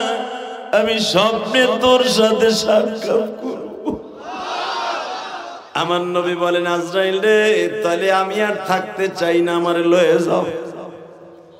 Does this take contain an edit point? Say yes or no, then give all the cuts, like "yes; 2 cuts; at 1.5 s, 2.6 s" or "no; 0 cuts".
yes; 1 cut; at 5.6 s